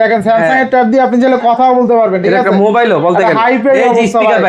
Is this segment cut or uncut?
uncut